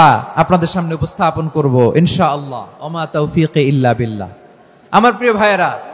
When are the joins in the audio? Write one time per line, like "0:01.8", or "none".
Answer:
none